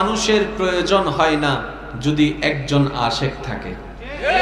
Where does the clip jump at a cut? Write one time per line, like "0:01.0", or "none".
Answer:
none